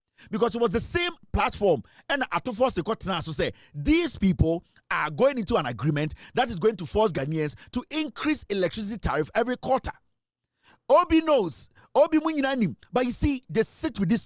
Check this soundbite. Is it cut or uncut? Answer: uncut